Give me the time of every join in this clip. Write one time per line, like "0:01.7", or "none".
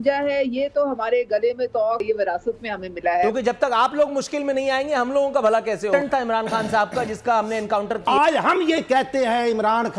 0:02.0
0:03.2
0:05.9
0:08.0